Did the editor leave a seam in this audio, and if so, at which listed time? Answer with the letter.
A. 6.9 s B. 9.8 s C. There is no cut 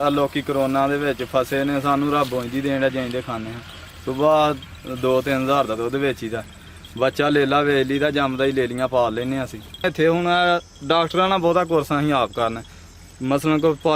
B